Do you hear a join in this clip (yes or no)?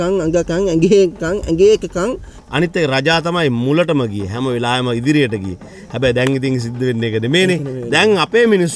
yes